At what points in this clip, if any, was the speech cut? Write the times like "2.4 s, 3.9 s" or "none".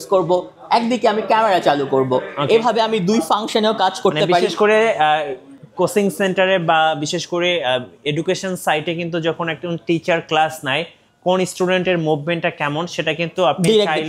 none